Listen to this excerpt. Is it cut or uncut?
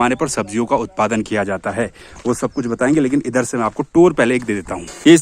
uncut